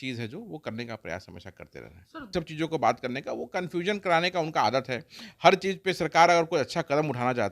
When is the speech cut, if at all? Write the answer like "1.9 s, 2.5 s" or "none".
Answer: 2.3 s